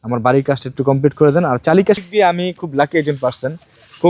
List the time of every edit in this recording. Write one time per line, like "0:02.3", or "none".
0:02.0

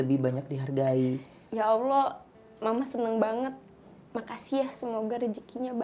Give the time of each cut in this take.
0:01.4

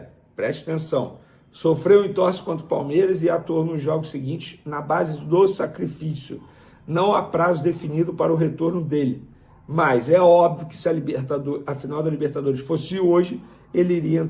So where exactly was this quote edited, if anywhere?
none

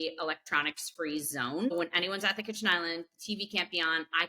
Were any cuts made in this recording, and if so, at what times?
0:01.7

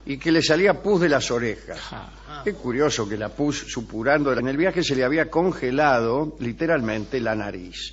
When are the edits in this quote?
none

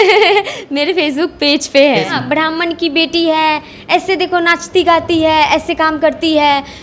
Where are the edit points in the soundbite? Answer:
0:02.1

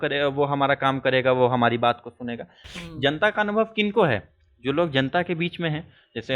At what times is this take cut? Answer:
0:02.6

